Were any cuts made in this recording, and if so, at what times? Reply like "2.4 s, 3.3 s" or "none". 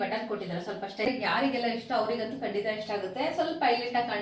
1.1 s